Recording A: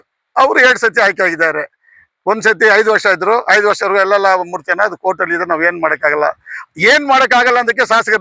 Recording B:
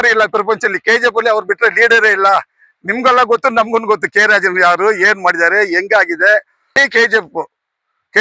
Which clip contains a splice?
B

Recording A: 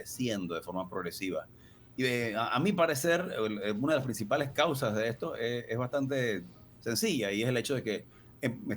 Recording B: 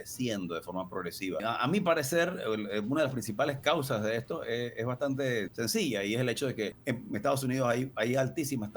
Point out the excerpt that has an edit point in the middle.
B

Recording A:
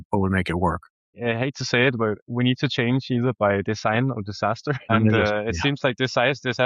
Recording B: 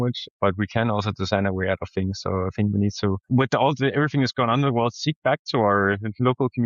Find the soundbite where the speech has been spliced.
A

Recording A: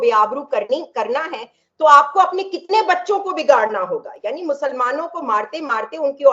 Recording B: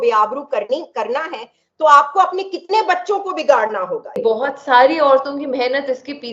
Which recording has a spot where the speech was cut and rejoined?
B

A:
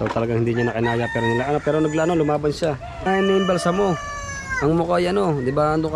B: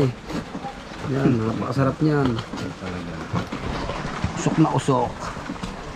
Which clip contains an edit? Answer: A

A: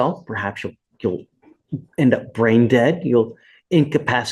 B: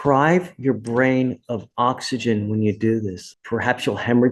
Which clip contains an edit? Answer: B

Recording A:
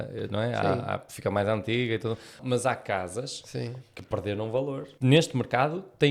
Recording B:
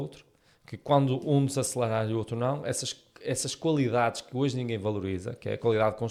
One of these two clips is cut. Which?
A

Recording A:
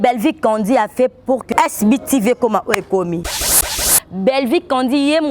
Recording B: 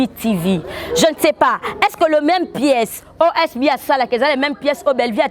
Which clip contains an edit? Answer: A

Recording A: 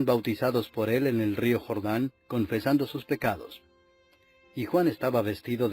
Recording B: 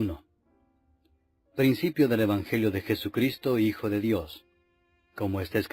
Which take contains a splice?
A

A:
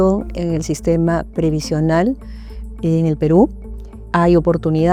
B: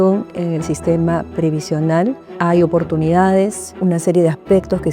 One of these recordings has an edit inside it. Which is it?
B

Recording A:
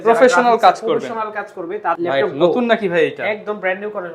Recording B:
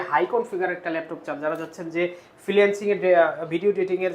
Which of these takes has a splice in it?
A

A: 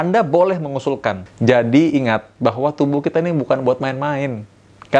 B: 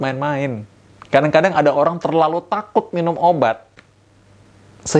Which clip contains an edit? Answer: A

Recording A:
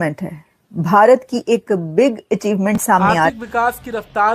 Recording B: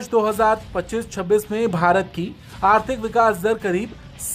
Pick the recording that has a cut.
A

